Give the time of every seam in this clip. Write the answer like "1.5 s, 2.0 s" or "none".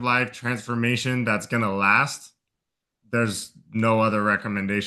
none